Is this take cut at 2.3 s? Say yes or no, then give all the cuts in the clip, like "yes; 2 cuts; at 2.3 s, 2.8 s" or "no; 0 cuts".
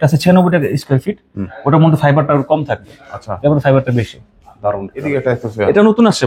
no; 1 cut; at 5.1 s